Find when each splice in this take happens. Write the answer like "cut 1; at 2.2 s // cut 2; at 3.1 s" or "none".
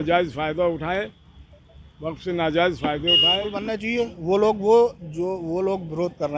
cut 1; at 3.8 s